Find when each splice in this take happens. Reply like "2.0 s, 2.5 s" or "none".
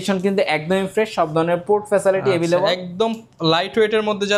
none